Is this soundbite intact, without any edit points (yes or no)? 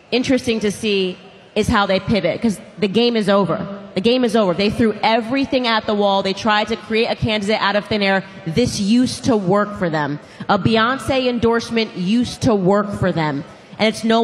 yes